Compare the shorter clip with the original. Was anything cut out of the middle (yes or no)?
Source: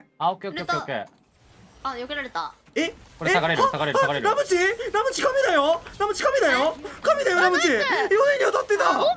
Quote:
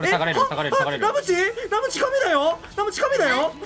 no